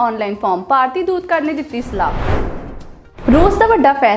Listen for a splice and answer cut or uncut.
cut